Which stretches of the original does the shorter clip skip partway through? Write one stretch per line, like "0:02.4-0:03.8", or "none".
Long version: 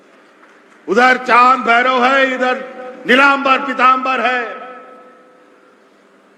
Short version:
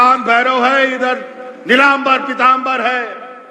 none